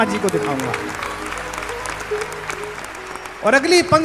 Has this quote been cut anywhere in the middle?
no; 0 cuts

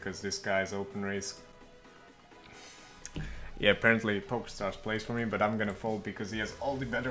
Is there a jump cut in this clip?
no; 0 cuts

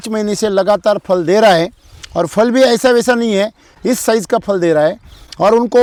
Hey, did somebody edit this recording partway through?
no; 0 cuts

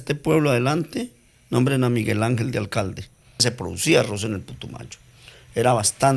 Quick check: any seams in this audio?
yes; 1 cut; at 3.4 s

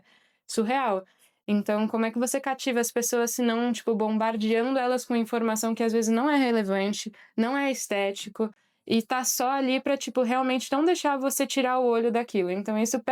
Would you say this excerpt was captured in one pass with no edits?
yes; 0 cuts

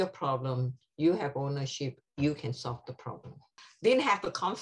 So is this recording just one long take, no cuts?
no; 1 cut; at 3.7 s

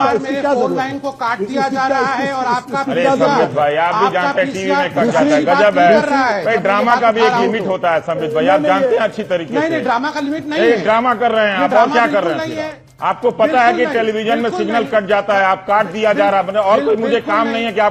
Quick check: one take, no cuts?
yes; 0 cuts

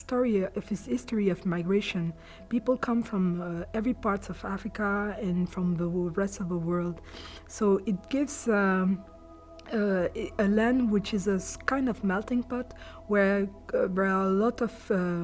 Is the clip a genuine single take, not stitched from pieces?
no; 1 cut; at 6.3 s

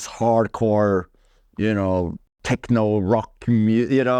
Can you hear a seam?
yes; 1 cut; at 2.3 s

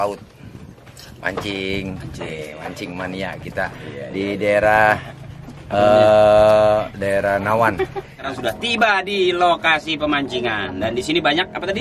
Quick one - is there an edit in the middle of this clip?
yes; 1 cut; at 8.3 s

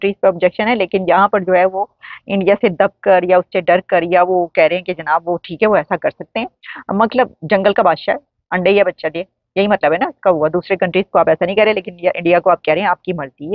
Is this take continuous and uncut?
yes; 0 cuts

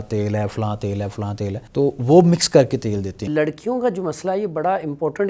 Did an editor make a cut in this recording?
yes; 2 cuts; at 1.6 s, 3.3 s

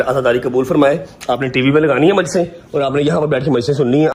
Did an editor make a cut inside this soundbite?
no; 0 cuts

